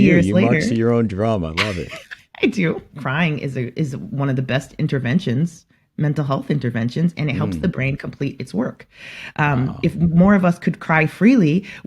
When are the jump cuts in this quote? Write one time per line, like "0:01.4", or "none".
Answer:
0:02.9